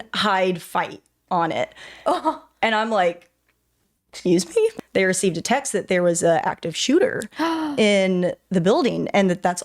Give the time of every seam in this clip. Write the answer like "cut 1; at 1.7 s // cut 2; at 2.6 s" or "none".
cut 1; at 4.7 s